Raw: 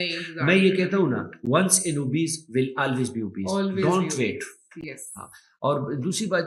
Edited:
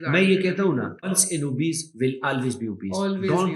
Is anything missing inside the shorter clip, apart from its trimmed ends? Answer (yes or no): yes